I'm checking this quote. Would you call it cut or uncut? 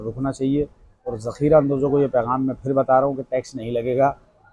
uncut